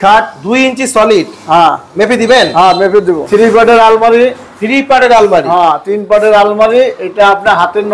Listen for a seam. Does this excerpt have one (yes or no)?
yes